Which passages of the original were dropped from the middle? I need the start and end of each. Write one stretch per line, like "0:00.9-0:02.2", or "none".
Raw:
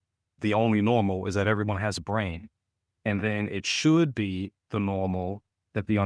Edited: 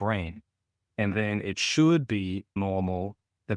0:04.6-0:04.8

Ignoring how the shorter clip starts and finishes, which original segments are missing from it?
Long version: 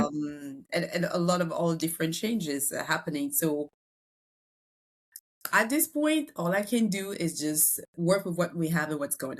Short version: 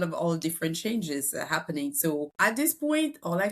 0:03.7-0:05.5

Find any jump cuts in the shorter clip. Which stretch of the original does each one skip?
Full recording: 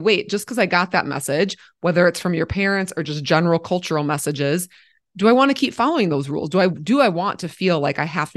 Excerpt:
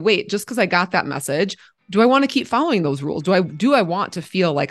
0:01.6-0:04.9

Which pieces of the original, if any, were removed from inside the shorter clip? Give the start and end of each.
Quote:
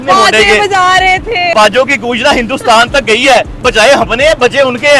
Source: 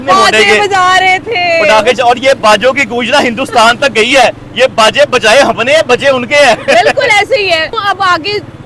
0:01.5-0:02.4
0:04.5-0:05.1

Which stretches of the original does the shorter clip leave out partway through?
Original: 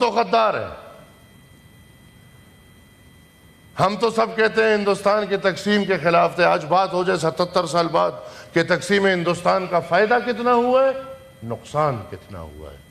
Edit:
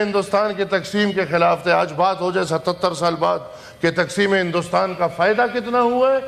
none

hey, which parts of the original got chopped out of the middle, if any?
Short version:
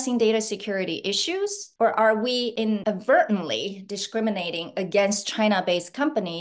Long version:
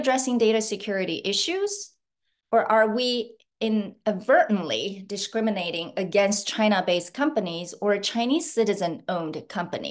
0:01.8-0:02.4
0:03.5-0:03.9

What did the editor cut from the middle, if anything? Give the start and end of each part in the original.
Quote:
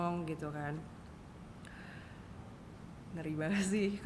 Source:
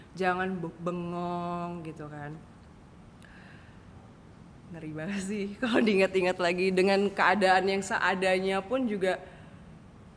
none

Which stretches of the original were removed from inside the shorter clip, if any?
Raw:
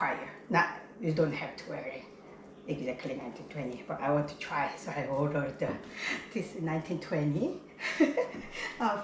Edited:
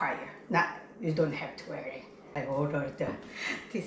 0:02.2-0:04.9

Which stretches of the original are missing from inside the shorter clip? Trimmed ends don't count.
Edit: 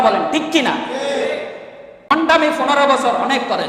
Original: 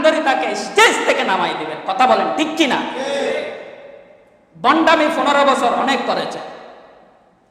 0:04.2-0:04.7

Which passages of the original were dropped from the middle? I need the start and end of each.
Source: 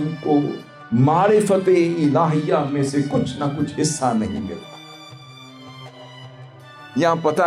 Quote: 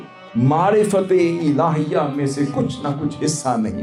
none

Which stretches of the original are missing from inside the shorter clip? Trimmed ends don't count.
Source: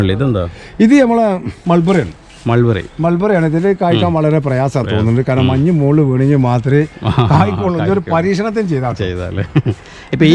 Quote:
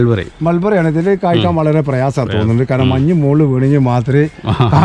none

